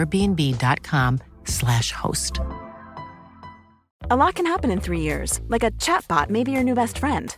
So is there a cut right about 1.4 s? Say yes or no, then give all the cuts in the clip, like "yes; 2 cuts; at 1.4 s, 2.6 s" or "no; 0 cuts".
no; 1 cut; at 3.9 s